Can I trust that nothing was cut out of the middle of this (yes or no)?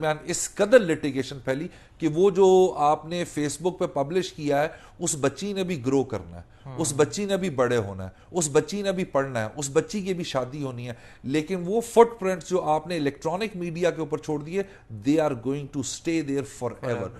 yes